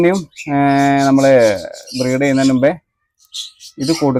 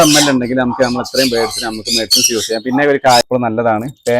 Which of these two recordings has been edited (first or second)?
second